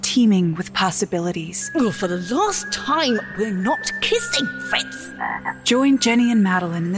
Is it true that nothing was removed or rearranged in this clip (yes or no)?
no